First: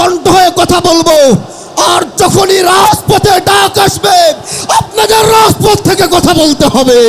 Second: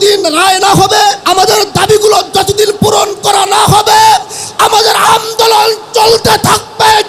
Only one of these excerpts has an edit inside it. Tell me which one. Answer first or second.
second